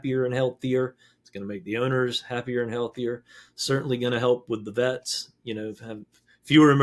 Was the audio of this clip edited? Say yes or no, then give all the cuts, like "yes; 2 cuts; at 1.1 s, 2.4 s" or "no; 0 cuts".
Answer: no; 0 cuts